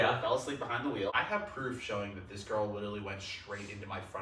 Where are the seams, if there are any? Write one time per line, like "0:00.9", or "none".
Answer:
0:01.1